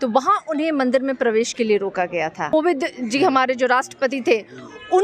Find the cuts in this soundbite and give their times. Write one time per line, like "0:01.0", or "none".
0:02.5